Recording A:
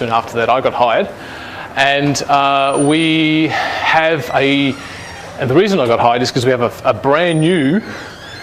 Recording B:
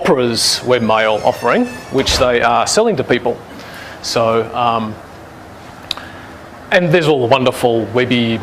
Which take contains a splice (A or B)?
A